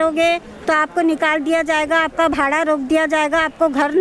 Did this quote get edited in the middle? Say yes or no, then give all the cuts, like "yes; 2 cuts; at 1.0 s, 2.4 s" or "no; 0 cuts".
no; 0 cuts